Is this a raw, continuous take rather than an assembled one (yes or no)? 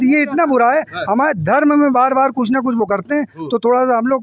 yes